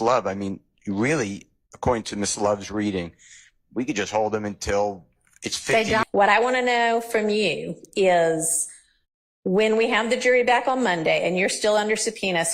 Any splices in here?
yes; 1 cut; at 6.0 s

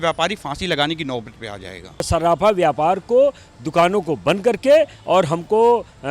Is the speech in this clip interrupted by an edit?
yes; 1 cut; at 2.1 s

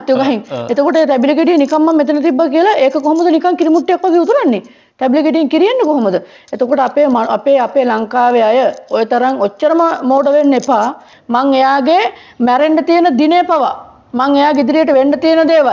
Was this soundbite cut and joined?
yes; 1 cut; at 11.1 s

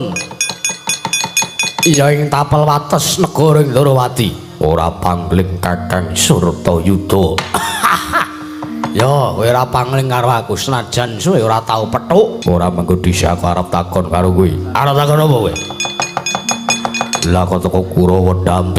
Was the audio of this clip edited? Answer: yes; 1 cut; at 12.4 s

